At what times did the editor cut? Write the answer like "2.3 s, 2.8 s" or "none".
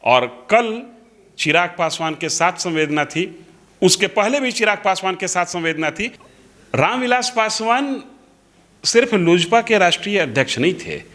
6.2 s